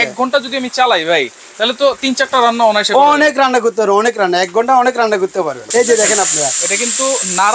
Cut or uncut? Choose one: cut